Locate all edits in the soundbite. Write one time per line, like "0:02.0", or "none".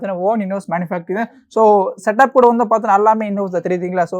none